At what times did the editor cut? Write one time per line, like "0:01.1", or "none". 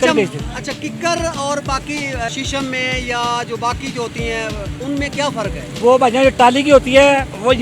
0:02.3
0:04.7
0:05.7

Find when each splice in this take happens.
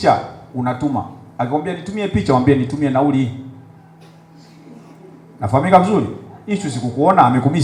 none

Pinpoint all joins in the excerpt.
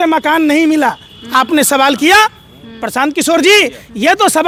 none

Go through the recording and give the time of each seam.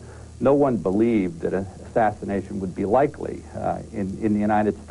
0:01.3

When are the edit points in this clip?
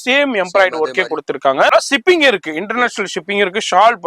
0:01.7

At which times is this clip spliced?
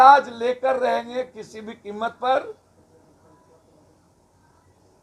none

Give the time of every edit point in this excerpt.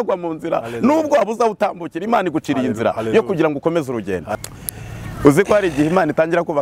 0:04.4

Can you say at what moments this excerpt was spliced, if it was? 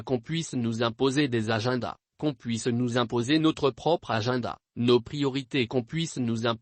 0:05.7

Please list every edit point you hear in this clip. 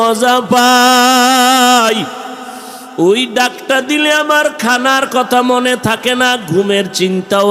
none

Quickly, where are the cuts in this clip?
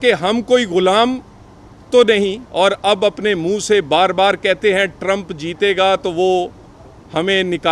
0:02.4

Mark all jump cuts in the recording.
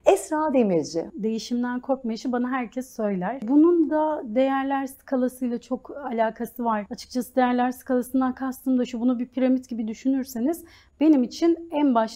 0:01.1
0:03.4
0:07.0

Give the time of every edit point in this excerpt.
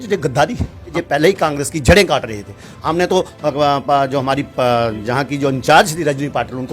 0:00.9

